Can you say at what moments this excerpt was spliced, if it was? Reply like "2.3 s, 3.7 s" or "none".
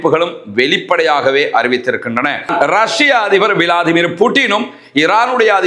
2.4 s